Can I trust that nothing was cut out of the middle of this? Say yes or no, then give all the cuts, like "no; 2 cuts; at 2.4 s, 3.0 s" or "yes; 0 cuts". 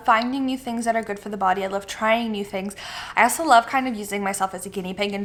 yes; 0 cuts